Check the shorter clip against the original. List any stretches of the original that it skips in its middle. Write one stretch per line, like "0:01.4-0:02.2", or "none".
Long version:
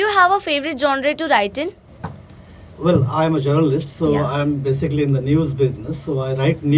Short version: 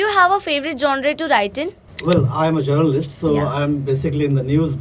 0:01.8-0:02.6